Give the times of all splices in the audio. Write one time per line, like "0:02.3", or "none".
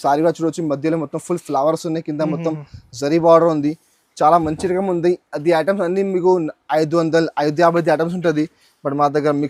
none

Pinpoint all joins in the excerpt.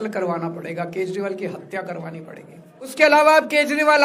0:02.9

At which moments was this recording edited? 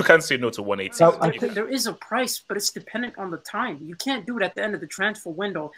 0:01.3

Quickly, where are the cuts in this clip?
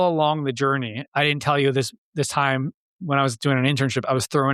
0:01.0

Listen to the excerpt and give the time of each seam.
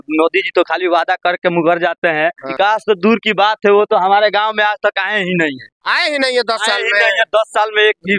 0:02.4

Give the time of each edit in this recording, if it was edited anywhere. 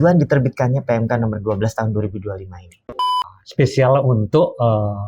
0:02.9

